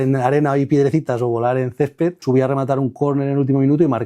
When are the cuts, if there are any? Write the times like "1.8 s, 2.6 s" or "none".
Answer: 2.2 s